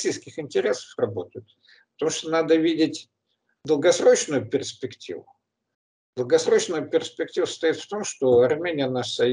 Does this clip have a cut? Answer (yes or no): no